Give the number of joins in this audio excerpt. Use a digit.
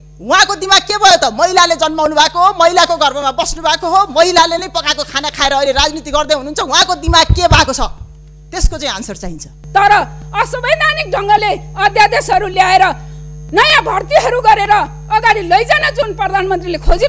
1